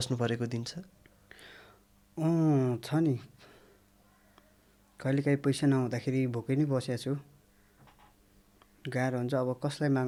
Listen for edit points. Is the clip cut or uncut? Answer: uncut